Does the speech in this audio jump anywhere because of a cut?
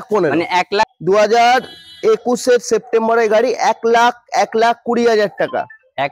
yes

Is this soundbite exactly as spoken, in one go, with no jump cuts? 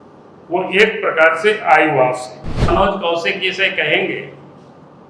no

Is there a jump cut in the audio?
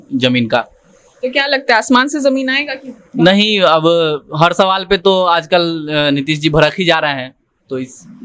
no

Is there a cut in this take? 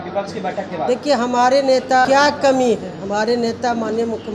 yes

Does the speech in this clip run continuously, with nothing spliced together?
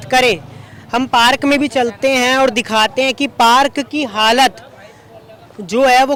yes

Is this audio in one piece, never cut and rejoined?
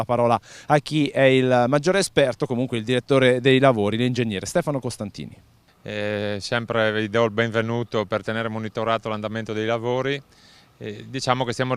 no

